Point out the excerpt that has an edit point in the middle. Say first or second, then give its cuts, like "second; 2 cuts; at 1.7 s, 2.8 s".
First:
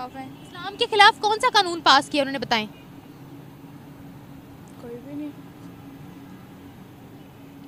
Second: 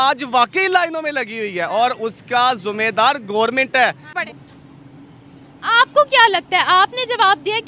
second; 1 cut; at 4.1 s